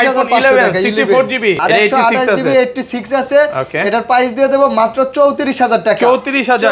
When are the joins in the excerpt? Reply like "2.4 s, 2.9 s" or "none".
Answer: 1.6 s